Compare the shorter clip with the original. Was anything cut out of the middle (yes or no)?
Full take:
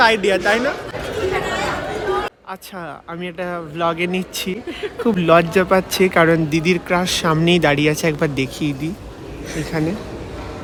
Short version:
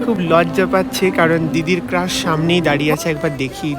no